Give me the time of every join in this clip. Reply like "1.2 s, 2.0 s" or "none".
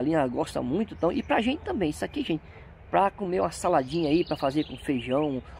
none